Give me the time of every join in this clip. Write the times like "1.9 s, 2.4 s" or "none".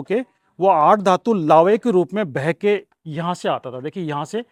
none